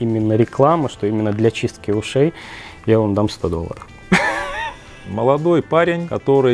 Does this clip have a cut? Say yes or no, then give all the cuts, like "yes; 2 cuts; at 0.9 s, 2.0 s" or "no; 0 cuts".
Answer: yes; 1 cut; at 5.0 s